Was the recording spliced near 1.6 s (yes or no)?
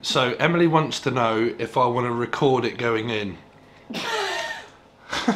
no